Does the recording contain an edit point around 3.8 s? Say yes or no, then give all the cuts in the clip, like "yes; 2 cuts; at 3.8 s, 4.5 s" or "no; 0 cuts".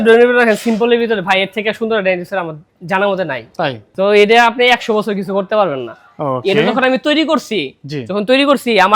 yes; 1 cut; at 3.8 s